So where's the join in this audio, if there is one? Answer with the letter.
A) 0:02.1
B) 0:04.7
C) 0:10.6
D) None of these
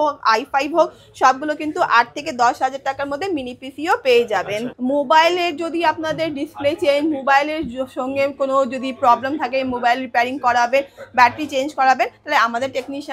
B